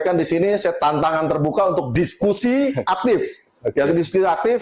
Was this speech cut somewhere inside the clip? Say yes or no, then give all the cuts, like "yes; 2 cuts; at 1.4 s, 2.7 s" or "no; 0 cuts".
no; 0 cuts